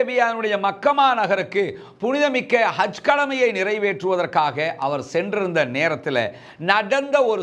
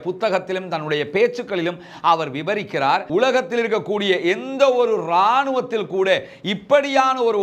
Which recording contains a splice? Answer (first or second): second